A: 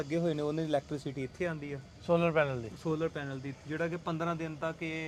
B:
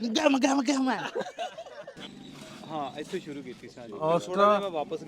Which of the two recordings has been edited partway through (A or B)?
B